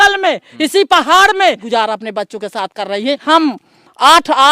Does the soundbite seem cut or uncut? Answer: cut